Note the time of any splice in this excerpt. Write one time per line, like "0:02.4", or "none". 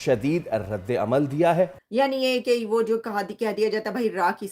0:01.8